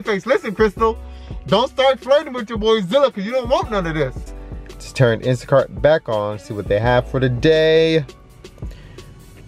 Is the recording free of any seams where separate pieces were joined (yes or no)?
no